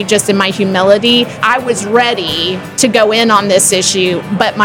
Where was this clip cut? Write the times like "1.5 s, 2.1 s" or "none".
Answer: 1.4 s, 2.6 s